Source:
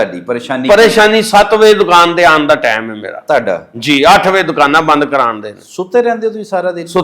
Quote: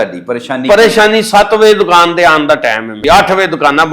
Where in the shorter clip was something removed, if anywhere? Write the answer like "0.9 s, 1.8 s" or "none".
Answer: 3.0 s